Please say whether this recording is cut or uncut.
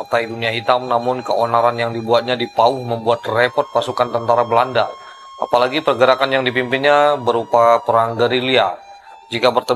uncut